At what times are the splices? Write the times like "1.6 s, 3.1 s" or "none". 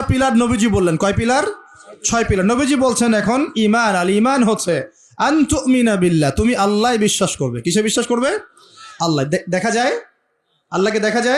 none

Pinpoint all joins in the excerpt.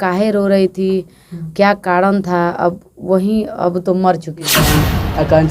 4.6 s

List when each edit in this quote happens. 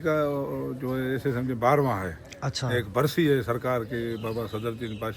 none

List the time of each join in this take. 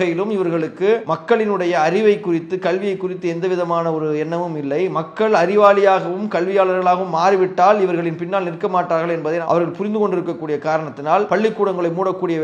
1.1 s, 11.3 s

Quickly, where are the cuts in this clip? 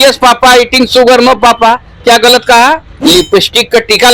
2.9 s

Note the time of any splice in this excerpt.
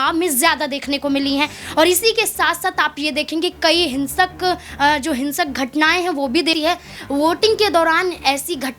6.6 s

